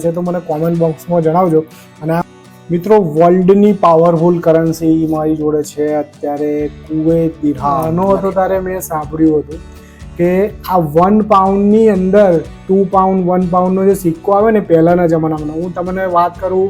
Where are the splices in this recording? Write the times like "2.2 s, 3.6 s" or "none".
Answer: 2.3 s, 7.9 s